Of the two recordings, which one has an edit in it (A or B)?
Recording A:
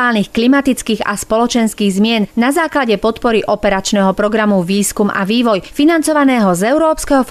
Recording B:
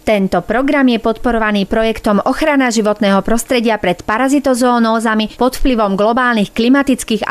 A